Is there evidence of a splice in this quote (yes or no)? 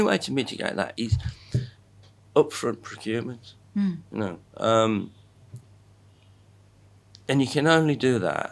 no